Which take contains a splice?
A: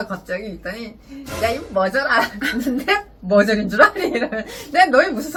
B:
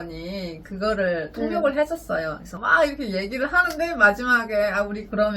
B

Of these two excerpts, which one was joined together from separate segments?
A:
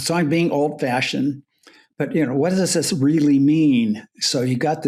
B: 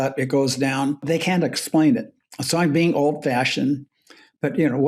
B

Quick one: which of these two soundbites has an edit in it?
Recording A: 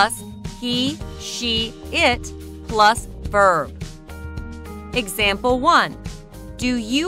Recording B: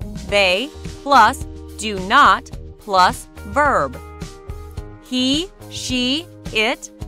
A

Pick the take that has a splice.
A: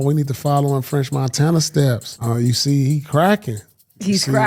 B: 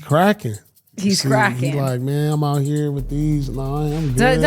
A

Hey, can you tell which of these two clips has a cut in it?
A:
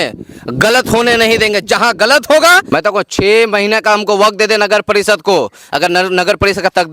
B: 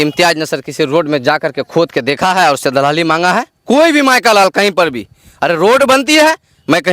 A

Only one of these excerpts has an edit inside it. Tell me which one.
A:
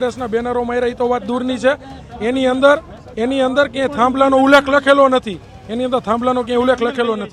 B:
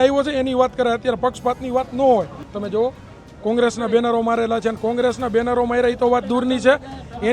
B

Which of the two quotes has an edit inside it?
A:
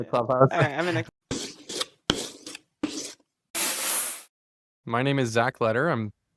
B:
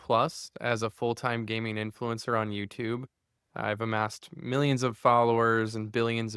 A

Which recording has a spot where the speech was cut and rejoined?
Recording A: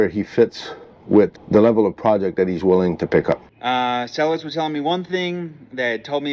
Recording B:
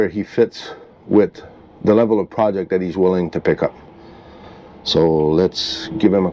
A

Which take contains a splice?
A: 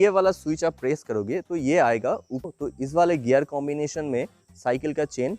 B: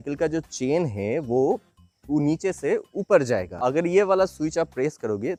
A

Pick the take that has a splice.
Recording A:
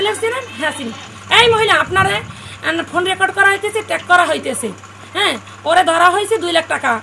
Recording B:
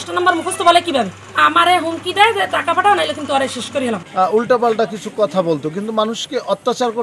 B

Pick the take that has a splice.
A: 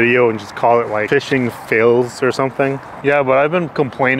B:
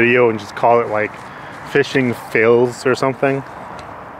A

